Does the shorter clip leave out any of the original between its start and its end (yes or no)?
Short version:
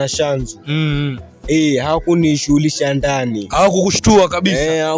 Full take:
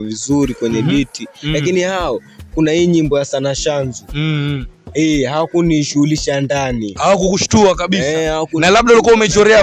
no